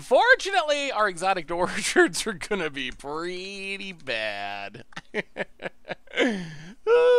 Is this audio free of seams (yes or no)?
yes